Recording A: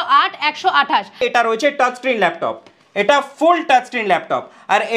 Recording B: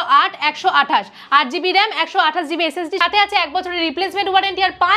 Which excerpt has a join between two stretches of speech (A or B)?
A